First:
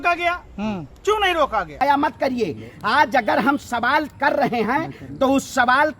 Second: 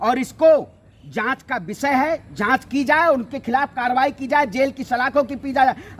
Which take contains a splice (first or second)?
first